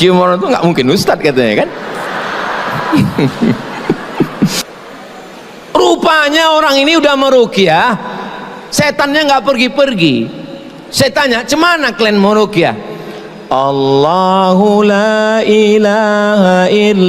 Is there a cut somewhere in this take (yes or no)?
yes